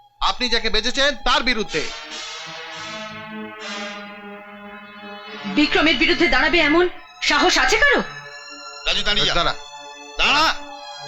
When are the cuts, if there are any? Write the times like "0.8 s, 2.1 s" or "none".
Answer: none